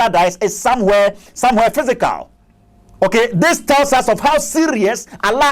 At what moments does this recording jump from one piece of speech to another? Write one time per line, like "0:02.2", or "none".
none